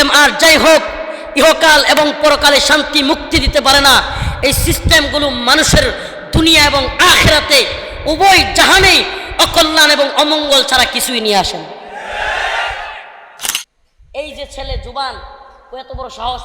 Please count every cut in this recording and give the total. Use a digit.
1